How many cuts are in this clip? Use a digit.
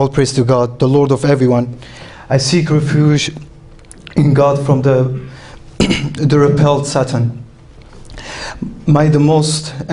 1